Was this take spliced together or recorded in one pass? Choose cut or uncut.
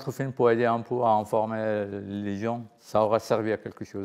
cut